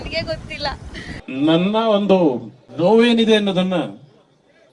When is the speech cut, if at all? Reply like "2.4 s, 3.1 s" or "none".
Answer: 1.2 s